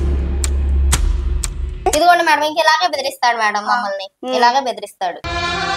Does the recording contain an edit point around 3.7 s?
no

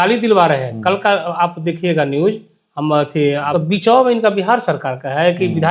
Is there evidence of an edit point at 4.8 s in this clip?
no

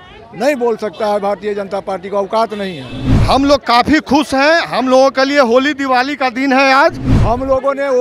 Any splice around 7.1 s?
yes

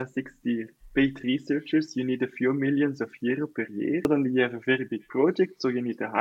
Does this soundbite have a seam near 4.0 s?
yes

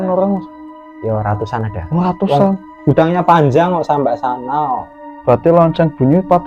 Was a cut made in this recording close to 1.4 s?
no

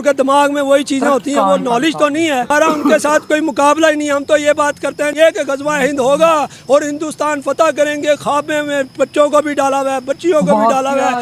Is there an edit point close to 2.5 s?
yes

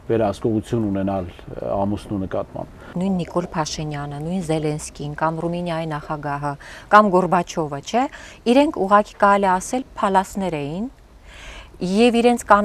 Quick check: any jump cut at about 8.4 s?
no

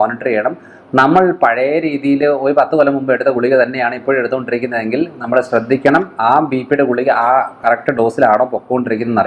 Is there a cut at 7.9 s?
no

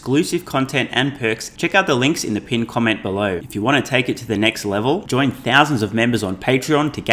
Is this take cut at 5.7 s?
no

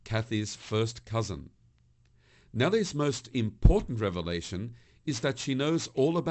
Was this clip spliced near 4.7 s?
no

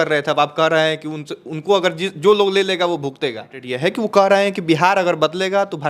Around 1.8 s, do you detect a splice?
no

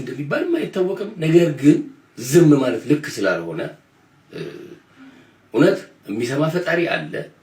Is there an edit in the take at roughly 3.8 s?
no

